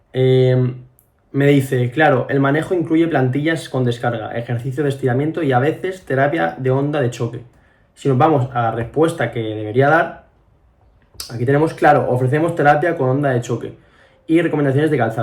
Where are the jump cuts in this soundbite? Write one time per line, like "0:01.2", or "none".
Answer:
none

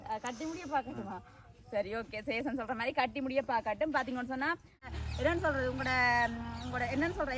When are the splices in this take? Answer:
0:04.9

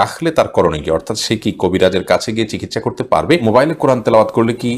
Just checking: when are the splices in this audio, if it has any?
0:03.4

